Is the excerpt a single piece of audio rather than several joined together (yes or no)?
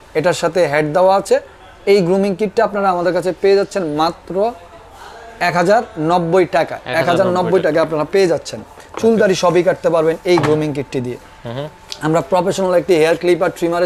yes